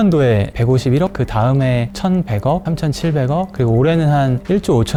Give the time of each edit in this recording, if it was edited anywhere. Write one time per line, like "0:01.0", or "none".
none